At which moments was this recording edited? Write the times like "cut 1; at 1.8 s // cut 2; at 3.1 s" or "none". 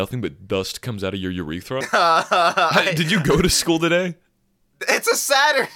cut 1; at 1.9 s